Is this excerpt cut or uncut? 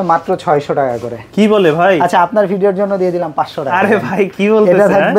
uncut